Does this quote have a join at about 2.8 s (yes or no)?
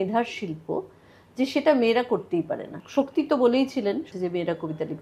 yes